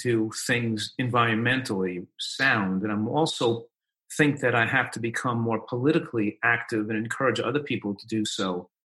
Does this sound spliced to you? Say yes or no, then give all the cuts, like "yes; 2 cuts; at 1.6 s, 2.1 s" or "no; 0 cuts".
no; 0 cuts